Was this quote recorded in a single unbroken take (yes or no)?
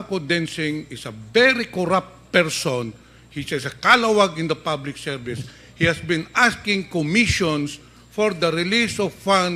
yes